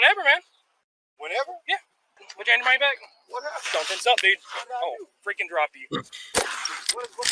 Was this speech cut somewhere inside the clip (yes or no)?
yes